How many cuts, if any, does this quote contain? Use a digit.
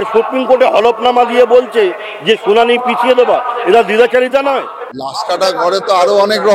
1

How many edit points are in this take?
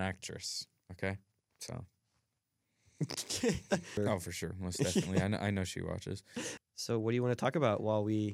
2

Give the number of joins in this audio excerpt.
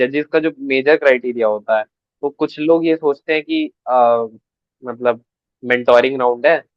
0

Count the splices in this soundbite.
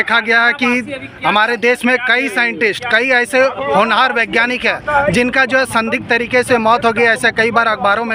0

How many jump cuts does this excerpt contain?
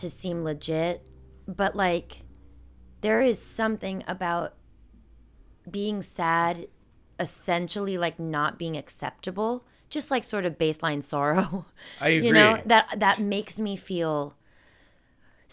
0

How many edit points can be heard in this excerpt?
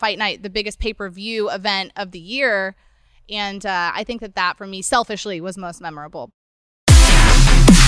1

